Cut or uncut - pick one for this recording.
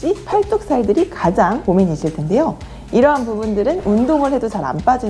uncut